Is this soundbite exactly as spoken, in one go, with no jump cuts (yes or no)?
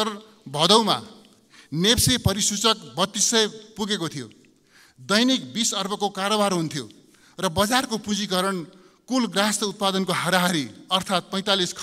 yes